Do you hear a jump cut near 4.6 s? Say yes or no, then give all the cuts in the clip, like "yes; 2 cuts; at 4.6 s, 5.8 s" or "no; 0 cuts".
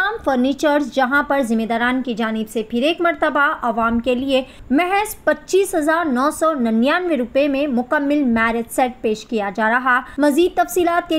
yes; 2 cuts; at 4.6 s, 10.1 s